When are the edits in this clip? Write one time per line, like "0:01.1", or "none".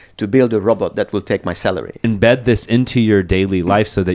0:02.0